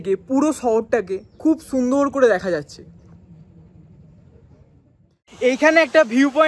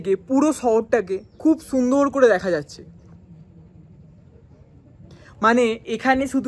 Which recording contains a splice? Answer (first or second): first